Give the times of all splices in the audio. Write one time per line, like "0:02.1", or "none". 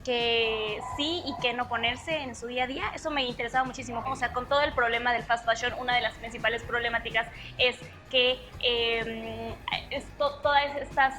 0:04.1